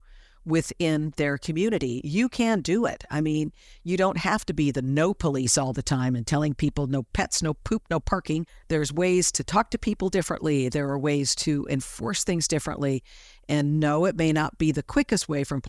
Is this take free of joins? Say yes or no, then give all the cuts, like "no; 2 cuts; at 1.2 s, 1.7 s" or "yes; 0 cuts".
no; 1 cut; at 8.5 s